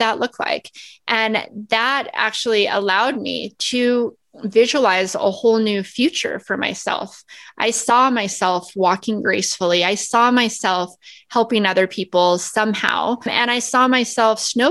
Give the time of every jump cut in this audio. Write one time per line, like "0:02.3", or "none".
none